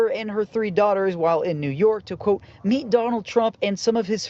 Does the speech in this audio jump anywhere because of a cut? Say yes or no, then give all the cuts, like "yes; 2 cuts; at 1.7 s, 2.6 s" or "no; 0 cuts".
no; 0 cuts